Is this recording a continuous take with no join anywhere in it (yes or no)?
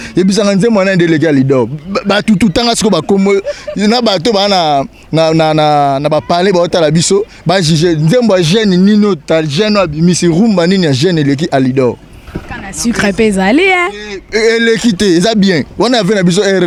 yes